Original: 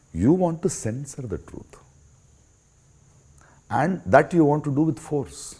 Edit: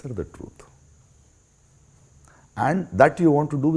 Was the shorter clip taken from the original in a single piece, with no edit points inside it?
yes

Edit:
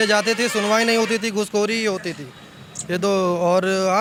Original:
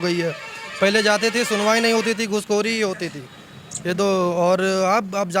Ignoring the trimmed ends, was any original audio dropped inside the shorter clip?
no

